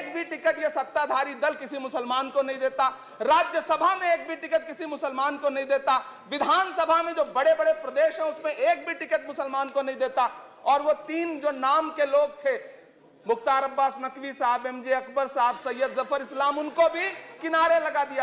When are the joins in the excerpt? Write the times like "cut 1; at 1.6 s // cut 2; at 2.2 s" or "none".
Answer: none